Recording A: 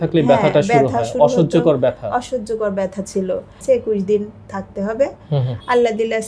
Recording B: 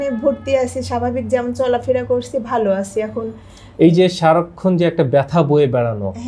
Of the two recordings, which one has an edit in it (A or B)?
A